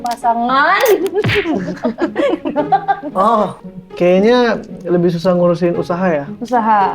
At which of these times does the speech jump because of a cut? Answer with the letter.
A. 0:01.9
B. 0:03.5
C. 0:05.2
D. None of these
B